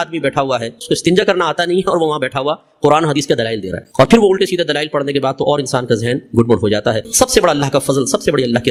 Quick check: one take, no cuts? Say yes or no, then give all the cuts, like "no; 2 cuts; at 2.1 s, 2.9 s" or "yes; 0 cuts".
yes; 0 cuts